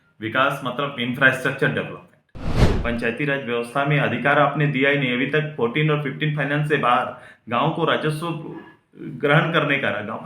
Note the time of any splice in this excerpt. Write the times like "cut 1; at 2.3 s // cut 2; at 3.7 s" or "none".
cut 1; at 2.7 s